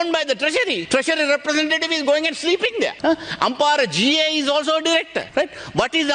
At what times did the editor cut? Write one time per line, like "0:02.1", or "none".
0:00.8
0:03.0
0:05.2